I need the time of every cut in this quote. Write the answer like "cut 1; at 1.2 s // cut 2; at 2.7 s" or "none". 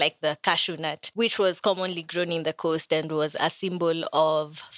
cut 1; at 1.0 s